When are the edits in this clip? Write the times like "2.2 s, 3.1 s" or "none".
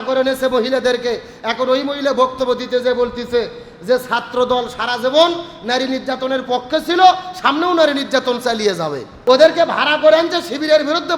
9.1 s